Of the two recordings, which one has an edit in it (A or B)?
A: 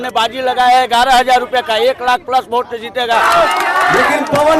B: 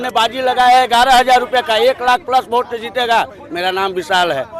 A